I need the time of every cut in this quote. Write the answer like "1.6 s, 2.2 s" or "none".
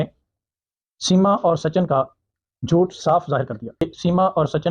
3.8 s